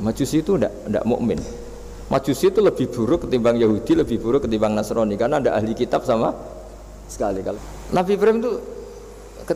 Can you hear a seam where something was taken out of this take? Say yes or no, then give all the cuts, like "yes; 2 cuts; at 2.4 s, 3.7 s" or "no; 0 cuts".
yes; 1 cut; at 7.5 s